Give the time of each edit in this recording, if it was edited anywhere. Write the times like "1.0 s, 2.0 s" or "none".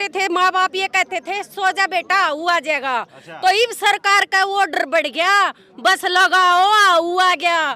none